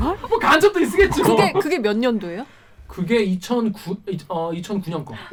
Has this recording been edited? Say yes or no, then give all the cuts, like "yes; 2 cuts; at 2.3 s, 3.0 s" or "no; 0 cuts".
no; 0 cuts